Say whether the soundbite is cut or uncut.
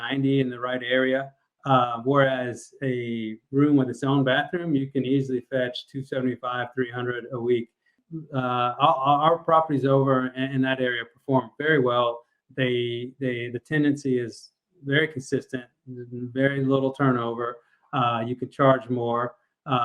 cut